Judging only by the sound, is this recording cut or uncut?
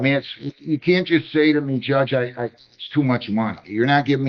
uncut